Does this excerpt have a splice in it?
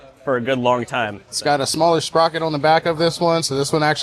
yes; 1 cut; at 1.2 s

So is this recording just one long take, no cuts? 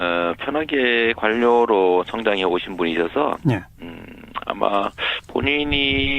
no; 1 cut; at 2.4 s

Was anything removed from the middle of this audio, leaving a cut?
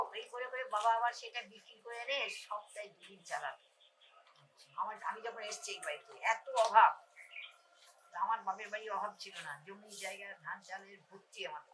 no; 0 cuts

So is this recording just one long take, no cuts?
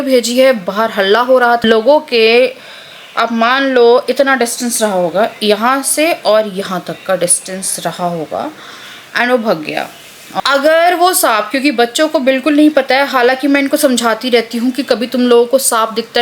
no; 2 cuts; at 1.6 s, 10.4 s

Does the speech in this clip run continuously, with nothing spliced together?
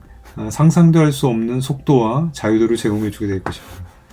yes; 0 cuts

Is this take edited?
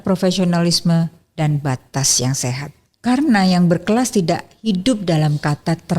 yes; 1 cut; at 2.9 s

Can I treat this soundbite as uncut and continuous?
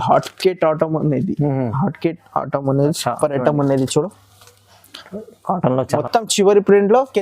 no; 1 cut; at 6.0 s

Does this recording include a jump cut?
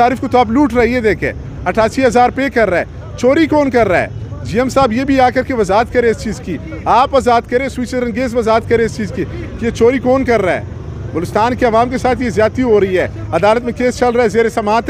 no; 0 cuts

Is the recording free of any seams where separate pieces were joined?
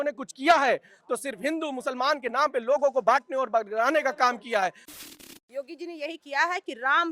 no; 1 cut; at 4.8 s

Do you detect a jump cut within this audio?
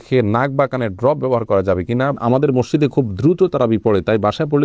yes; 1 cut; at 2.2 s

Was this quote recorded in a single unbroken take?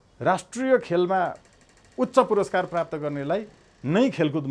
yes; 0 cuts

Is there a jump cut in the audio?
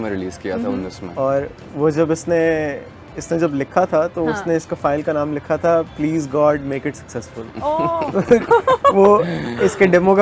no; 0 cuts

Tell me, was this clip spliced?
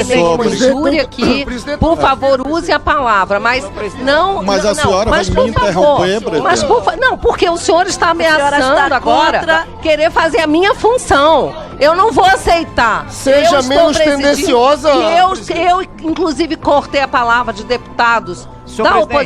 no; 0 cuts

